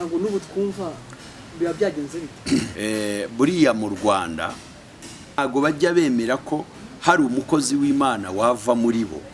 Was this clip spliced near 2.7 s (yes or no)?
yes